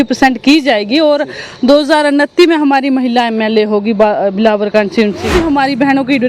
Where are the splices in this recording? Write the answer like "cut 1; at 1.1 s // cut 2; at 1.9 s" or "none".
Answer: cut 1; at 5.3 s